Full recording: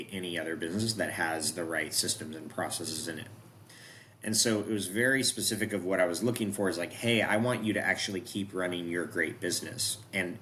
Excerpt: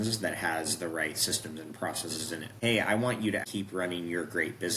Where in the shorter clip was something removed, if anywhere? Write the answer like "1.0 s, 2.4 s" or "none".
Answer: 2.5 s, 3.5 s